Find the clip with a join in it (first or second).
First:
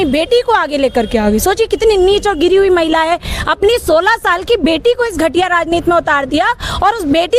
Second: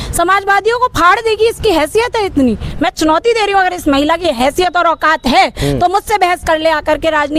second